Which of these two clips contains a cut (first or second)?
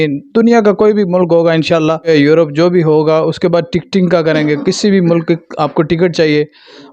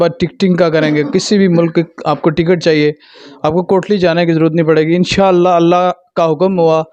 first